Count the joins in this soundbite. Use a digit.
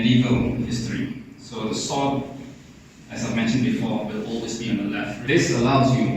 1